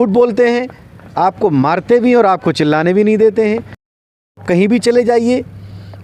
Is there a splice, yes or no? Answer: yes